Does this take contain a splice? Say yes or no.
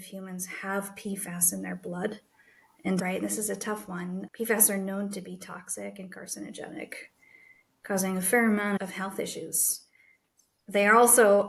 no